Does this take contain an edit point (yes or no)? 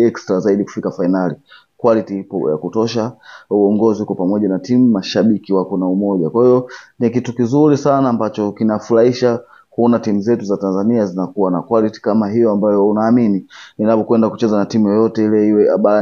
no